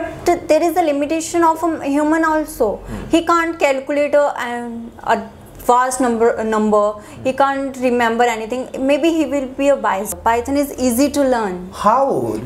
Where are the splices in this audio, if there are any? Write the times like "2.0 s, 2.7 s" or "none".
10.1 s